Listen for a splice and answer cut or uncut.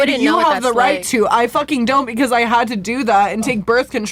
uncut